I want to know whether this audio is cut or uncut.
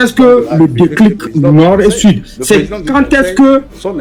uncut